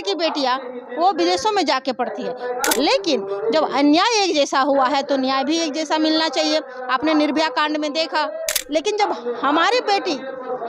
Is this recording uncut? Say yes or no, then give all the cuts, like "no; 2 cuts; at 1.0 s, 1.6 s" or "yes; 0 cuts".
no; 2 cuts; at 2.7 s, 8.6 s